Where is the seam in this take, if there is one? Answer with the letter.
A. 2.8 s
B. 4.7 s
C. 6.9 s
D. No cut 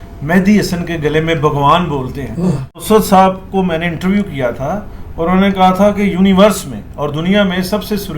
A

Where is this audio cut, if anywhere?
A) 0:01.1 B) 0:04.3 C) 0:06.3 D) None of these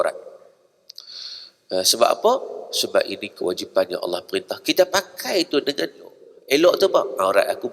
C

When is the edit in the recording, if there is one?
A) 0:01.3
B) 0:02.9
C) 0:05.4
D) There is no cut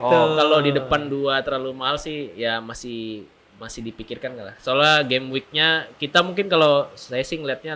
D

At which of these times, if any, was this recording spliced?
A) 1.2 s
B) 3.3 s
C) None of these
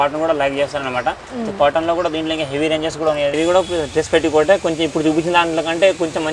B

